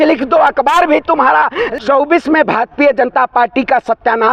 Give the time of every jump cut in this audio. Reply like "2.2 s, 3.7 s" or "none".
1.6 s